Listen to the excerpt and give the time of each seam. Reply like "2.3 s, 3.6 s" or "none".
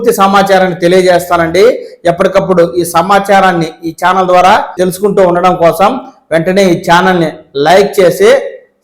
4.8 s

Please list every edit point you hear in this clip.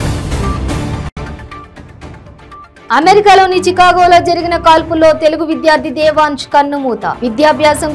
1.0 s

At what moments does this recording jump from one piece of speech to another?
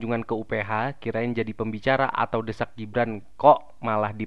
none

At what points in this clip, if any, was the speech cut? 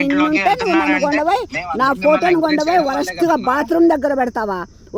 none

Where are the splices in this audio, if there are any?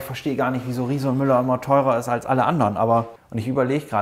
3.1 s

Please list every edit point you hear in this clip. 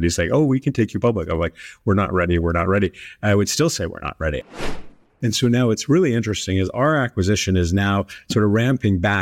4.7 s

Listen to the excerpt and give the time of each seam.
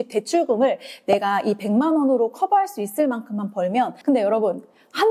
4.0 s

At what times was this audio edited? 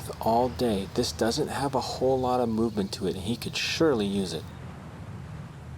4.4 s

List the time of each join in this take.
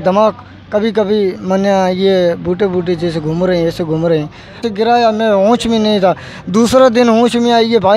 4.7 s

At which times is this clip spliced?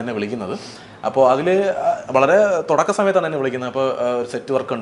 none

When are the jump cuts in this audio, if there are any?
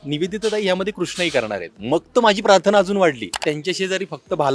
3.3 s

